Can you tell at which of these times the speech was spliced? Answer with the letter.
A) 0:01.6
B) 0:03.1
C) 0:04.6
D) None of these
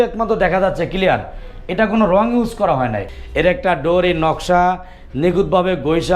B